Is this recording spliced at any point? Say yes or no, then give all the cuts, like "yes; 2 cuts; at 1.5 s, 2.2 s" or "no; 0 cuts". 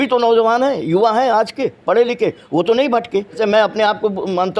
yes; 1 cut; at 3.4 s